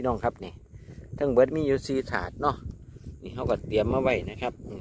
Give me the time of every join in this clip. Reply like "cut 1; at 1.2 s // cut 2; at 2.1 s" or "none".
none